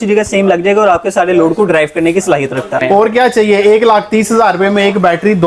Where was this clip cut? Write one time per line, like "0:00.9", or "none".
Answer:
0:02.8